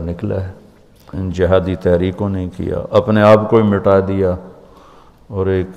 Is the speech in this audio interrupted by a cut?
no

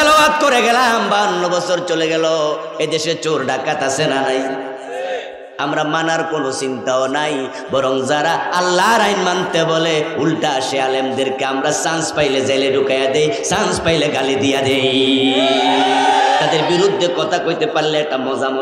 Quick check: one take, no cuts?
yes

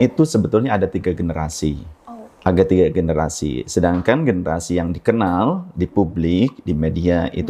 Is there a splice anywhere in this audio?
no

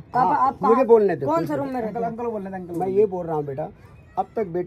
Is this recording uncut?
yes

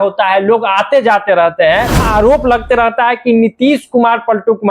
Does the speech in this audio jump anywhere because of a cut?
yes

